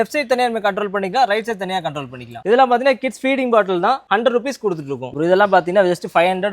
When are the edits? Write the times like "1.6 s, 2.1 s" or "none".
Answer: 2.3 s, 4.0 s, 5.1 s